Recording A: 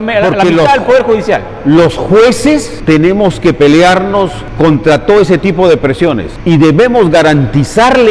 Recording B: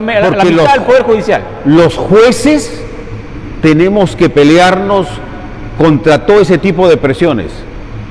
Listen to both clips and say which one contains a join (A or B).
A